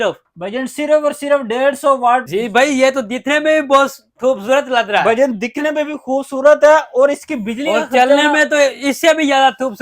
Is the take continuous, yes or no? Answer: no